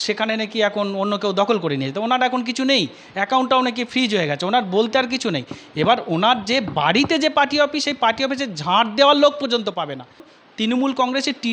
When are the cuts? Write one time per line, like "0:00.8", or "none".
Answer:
0:10.3